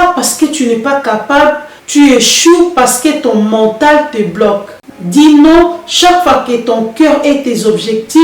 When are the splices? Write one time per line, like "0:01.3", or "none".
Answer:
0:04.8

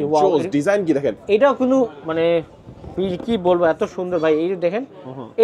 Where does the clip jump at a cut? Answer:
none

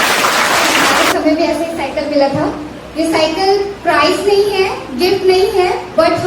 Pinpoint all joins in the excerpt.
0:01.0

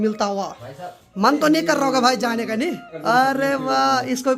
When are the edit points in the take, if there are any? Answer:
0:01.1
0:02.9

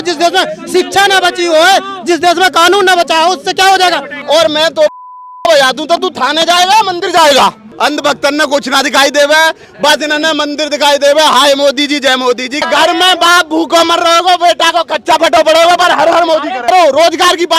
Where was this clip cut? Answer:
0:04.1
0:07.6
0:12.6
0:16.7

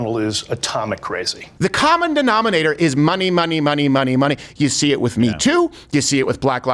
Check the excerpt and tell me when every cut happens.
0:01.4

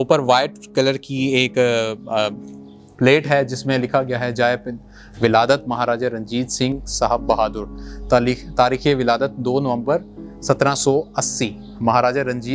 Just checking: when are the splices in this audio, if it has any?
none

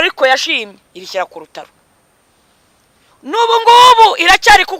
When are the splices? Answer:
none

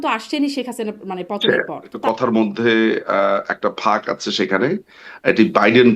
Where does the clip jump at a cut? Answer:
0:01.9

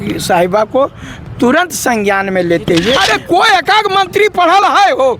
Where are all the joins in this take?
0:03.0

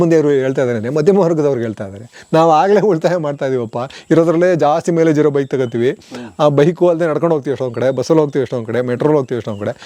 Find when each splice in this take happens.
none

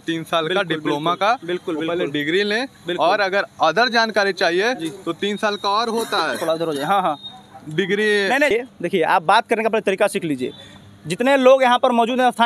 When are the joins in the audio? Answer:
0:08.5

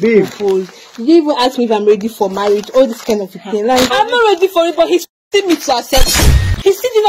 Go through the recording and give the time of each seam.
0:03.9

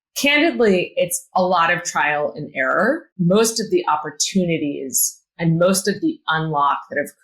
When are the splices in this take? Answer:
0:03.1

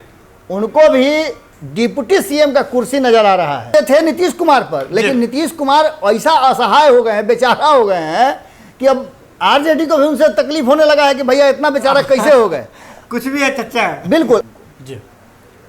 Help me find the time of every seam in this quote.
0:03.6
0:14.4

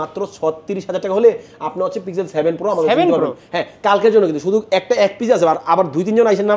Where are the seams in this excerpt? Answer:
none

